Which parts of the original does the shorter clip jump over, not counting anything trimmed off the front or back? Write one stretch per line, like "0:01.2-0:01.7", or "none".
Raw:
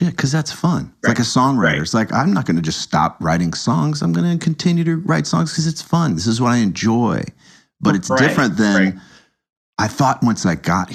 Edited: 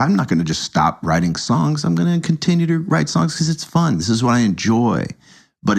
none